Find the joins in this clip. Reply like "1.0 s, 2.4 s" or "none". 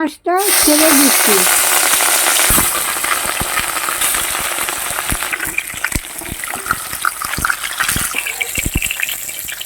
5.3 s, 8.1 s